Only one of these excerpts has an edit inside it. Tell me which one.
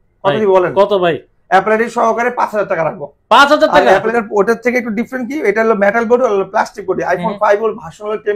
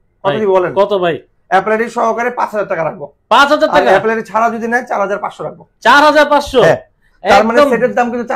first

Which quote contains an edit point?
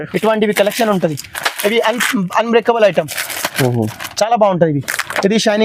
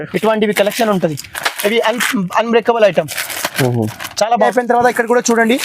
second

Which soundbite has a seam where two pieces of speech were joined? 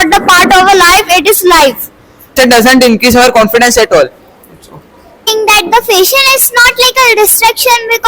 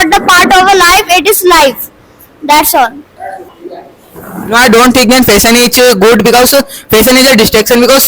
first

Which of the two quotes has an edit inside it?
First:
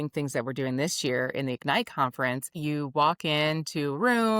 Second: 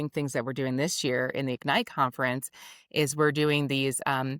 first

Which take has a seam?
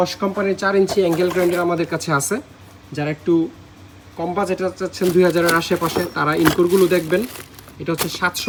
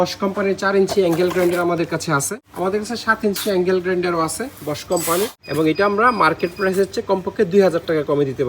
second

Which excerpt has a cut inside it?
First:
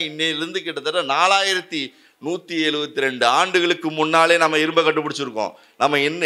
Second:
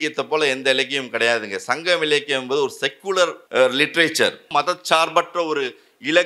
second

